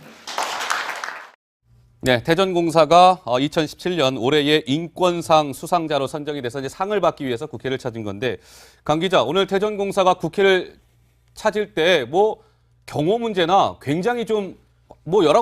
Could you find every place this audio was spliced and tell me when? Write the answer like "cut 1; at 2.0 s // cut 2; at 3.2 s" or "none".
cut 1; at 3.4 s